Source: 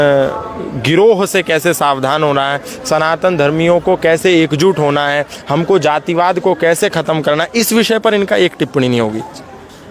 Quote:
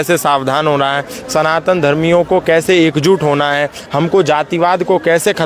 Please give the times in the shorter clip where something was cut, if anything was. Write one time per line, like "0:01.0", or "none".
none